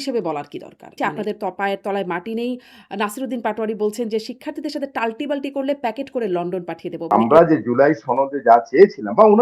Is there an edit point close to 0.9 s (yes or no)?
yes